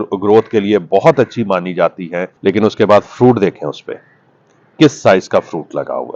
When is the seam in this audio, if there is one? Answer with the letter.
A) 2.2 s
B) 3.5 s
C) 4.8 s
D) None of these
A